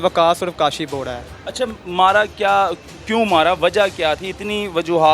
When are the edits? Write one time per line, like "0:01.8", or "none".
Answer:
none